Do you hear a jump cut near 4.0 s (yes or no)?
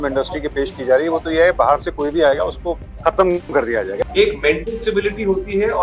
yes